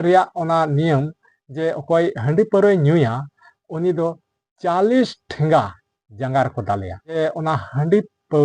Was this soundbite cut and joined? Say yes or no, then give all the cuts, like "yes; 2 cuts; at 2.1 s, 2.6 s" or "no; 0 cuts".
yes; 1 cut; at 7.0 s